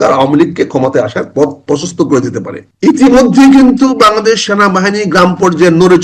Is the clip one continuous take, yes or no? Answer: no